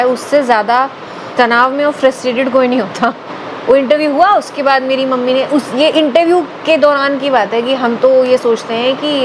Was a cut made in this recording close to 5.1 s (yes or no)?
no